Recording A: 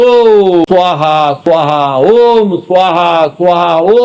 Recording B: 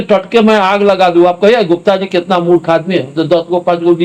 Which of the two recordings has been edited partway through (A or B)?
A